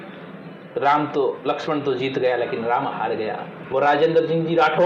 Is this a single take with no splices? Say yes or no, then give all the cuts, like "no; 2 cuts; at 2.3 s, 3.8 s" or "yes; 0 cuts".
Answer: no; 1 cut; at 3.5 s